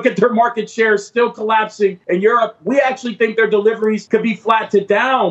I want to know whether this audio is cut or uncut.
cut